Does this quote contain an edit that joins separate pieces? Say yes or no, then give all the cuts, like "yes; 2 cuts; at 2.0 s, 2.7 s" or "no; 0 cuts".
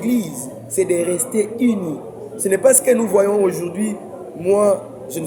no; 0 cuts